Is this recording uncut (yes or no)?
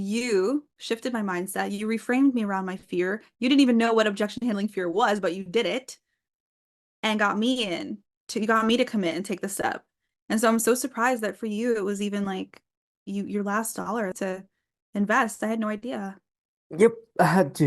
no